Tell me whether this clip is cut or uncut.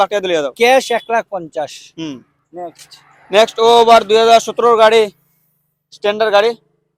uncut